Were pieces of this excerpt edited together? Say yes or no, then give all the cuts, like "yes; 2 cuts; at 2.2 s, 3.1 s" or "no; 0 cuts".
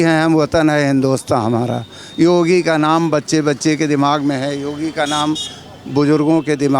no; 0 cuts